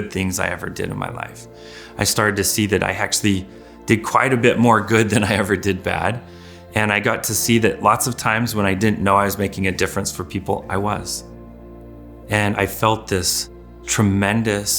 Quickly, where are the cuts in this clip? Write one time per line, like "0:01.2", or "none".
0:13.9

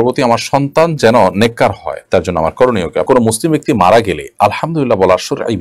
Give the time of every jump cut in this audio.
0:03.1

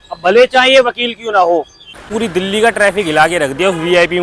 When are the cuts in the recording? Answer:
0:02.0

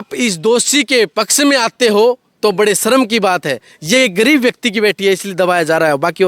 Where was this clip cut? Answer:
none

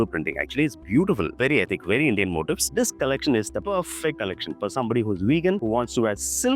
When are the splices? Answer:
0:02.7

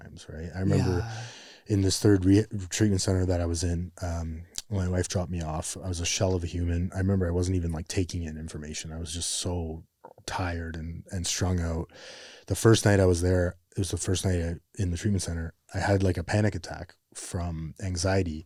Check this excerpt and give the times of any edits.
none

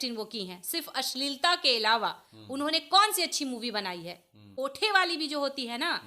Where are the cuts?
0:04.4

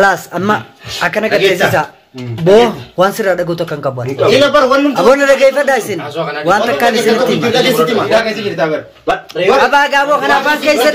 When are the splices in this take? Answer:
0:08.1

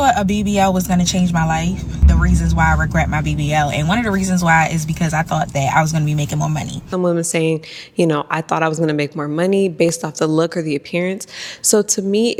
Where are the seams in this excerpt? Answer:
none

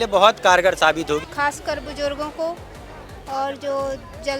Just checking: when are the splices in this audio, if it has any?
0:01.3

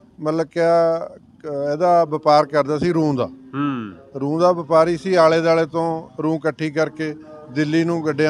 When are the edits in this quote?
none

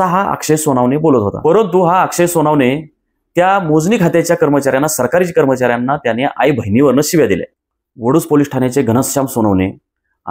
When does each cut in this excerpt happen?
0:01.3
0:07.6

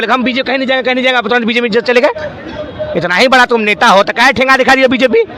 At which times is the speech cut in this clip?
none

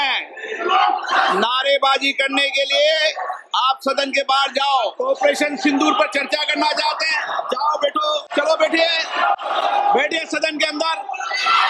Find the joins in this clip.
0:04.9
0:08.3

